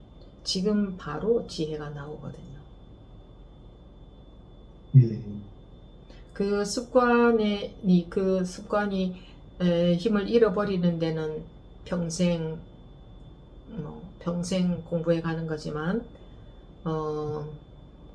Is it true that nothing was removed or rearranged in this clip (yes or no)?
yes